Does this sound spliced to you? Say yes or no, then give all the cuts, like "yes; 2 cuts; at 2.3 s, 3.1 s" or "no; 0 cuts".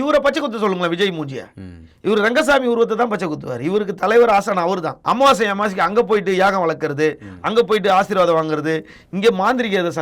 yes; 1 cut; at 4.9 s